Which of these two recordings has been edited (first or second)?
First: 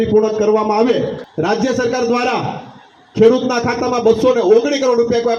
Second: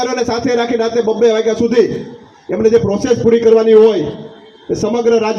first